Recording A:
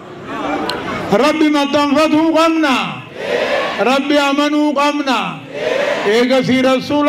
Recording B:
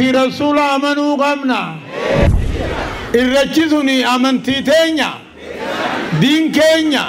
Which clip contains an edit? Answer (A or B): B